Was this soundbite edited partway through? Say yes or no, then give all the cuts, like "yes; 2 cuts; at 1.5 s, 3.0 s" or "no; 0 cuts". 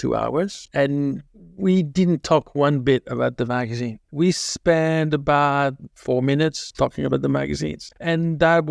no; 0 cuts